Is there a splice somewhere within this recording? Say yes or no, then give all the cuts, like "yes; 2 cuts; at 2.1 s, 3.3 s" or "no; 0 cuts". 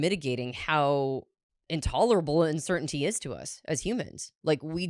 no; 0 cuts